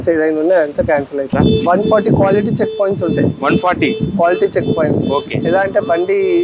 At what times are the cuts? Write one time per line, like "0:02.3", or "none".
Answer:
0:01.3